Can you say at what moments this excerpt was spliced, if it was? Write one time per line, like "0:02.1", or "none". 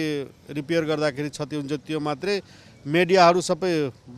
none